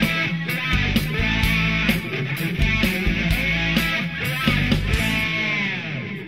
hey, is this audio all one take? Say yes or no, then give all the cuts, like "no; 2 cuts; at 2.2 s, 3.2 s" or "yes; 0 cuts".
yes; 0 cuts